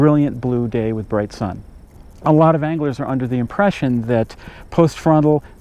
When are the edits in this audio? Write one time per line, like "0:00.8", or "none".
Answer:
0:03.4